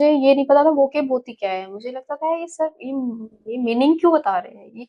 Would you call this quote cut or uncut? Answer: uncut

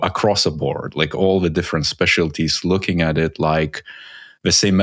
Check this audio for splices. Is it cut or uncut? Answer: uncut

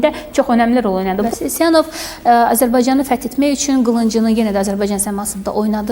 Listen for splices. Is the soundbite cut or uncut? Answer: cut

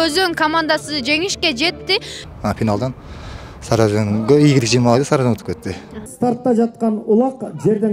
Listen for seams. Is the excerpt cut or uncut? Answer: cut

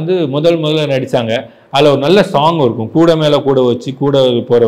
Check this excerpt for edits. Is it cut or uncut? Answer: uncut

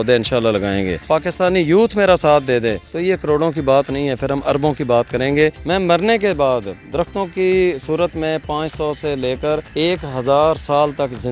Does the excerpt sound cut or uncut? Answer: cut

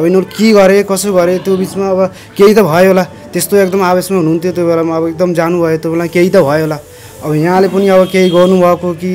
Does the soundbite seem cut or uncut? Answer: uncut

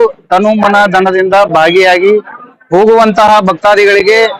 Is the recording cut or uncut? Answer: uncut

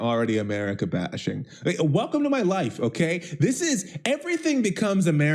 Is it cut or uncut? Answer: uncut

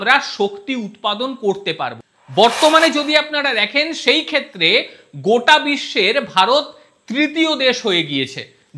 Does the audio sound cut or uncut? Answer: cut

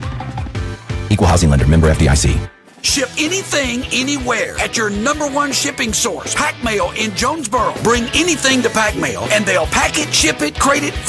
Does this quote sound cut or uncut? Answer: cut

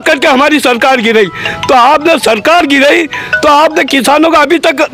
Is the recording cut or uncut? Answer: uncut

